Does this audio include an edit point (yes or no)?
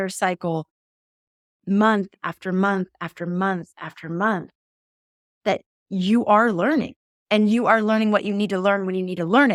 no